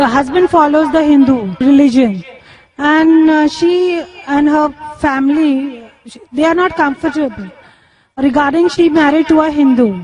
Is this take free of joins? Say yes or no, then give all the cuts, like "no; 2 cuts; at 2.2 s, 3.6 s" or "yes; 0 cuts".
no; 1 cut; at 3.3 s